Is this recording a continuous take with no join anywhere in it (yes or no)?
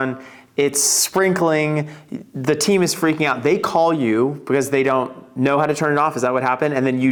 yes